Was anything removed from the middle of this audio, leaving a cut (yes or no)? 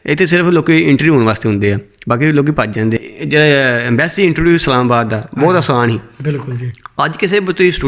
yes